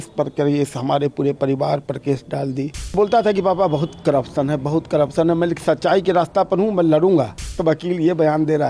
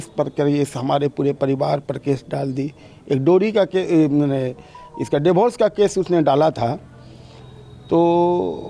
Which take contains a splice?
first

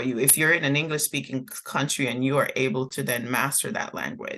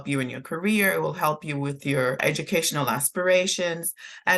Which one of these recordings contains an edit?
second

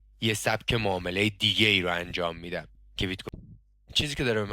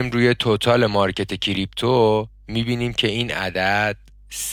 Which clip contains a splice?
first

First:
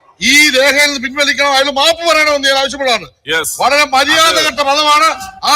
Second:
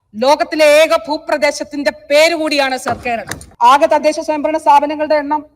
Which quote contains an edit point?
second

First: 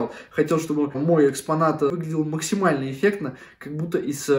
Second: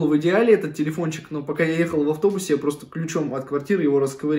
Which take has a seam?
first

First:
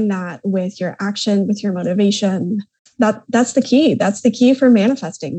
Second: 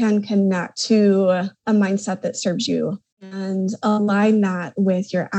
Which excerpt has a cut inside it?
second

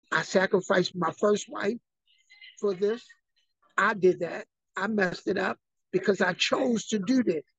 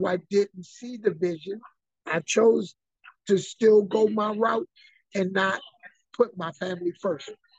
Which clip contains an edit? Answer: first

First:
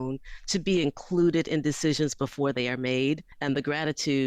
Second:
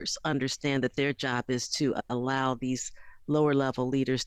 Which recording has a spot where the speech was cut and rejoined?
first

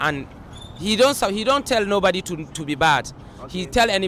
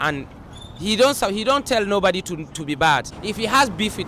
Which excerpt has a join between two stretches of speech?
second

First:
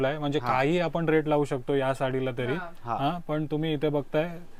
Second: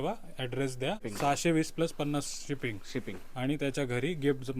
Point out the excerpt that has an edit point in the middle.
second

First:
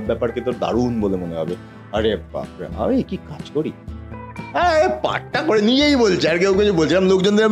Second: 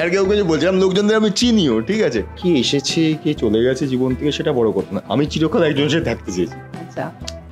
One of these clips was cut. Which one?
second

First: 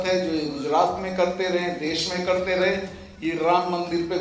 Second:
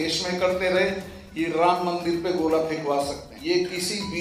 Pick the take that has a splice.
second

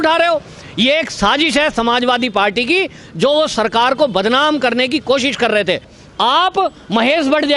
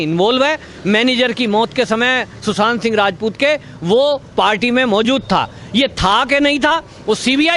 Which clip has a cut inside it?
first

